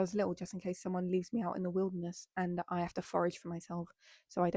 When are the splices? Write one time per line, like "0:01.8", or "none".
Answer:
none